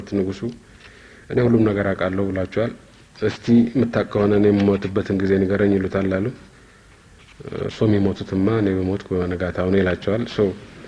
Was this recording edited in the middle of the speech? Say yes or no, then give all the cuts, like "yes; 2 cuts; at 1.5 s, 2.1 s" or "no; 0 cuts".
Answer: no; 0 cuts